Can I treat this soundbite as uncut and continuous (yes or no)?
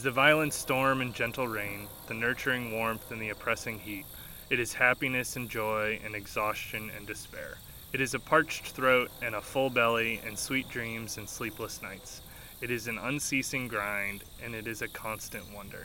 no